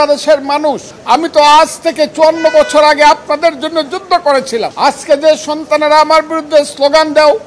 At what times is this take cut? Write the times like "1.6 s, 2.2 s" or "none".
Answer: 0.9 s, 4.7 s